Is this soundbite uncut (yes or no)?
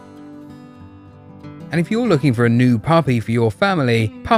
yes